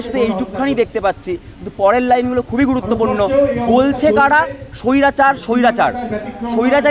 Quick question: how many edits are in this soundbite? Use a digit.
0